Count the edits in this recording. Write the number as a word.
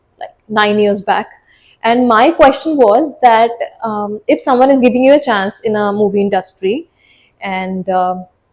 zero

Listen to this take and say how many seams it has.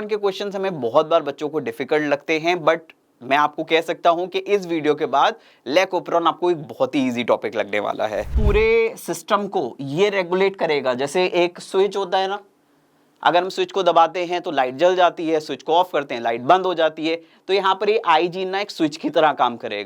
one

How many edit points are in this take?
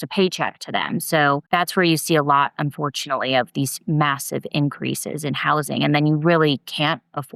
one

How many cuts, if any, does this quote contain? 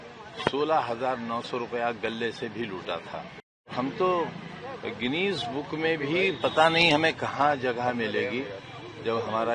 one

